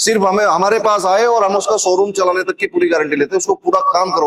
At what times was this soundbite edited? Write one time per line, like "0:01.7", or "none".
none